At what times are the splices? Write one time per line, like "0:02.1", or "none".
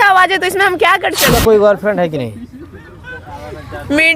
0:01.3